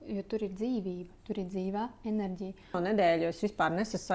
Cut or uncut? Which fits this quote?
cut